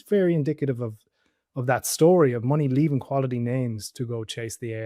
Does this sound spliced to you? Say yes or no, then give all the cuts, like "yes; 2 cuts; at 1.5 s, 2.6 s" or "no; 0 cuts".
no; 0 cuts